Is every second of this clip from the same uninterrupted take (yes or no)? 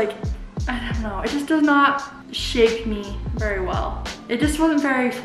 no